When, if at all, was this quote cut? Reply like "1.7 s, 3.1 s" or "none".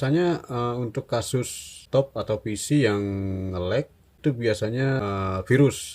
1.8 s, 4.2 s, 5.0 s